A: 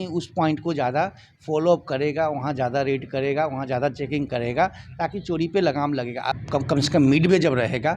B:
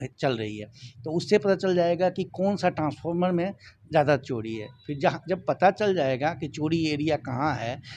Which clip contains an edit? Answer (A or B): A